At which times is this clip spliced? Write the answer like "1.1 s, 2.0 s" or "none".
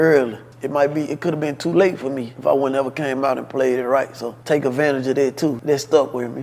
none